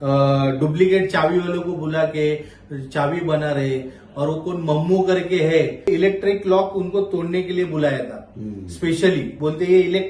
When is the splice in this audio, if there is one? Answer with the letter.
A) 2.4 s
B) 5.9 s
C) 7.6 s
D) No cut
B